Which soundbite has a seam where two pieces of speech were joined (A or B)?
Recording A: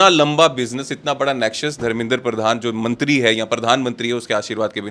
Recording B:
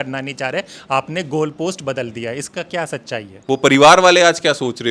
B